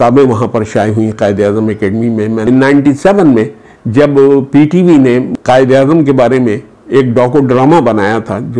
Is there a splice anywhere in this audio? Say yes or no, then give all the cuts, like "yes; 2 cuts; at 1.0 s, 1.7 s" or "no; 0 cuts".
yes; 2 cuts; at 2.5 s, 5.3 s